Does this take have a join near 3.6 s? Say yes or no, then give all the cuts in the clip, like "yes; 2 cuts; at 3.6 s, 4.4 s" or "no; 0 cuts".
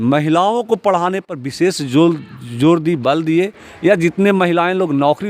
yes; 1 cut; at 3.6 s